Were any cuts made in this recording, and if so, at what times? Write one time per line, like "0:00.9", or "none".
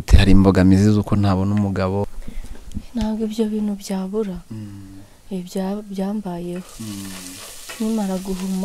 0:02.1